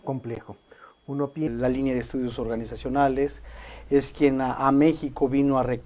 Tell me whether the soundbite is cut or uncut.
uncut